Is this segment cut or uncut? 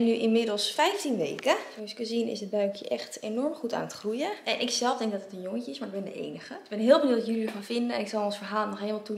uncut